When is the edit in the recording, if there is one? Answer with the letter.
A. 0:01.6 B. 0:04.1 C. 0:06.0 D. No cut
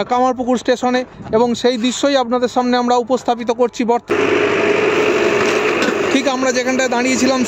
B